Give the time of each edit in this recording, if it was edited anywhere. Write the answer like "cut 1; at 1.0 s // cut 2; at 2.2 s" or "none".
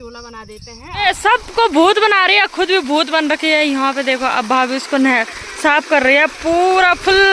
cut 1; at 1.0 s